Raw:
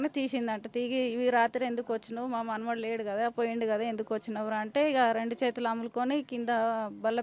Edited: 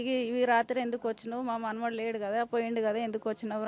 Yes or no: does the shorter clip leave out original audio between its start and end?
no